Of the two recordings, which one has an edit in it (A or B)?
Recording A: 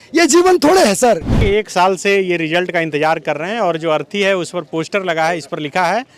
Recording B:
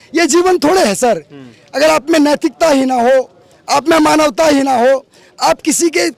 A